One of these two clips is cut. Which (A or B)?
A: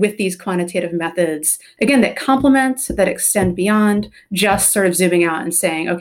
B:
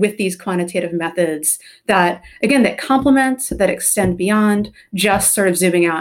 A